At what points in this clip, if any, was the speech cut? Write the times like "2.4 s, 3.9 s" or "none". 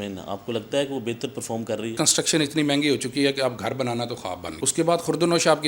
2.0 s, 4.5 s